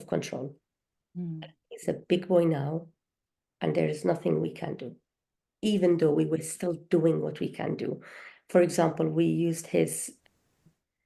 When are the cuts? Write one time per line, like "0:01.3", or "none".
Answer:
none